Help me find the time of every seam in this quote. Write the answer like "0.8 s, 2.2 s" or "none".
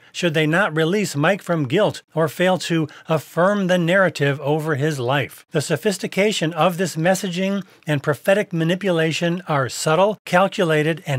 2.0 s, 5.4 s, 10.2 s